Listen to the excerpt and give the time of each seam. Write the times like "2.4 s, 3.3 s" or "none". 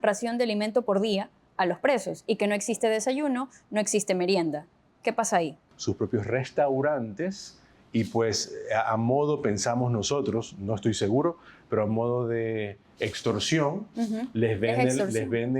5.7 s